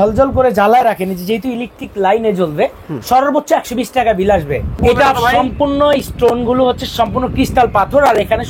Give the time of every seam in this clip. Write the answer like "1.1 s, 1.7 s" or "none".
4.7 s